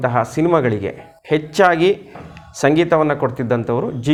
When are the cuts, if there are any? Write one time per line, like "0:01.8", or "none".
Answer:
none